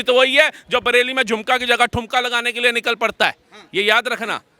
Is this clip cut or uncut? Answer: uncut